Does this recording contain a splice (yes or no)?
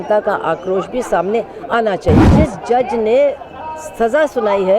yes